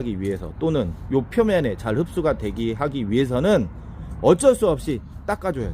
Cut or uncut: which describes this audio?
uncut